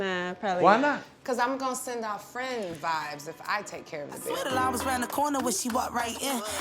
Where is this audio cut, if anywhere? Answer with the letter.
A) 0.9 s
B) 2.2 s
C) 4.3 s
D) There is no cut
C